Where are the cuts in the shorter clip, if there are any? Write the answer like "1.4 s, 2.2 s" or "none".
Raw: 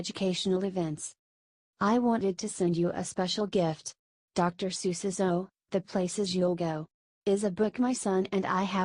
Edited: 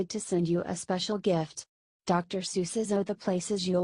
2.7 s